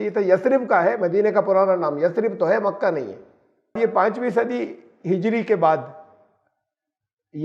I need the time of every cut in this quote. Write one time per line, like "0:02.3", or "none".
0:03.8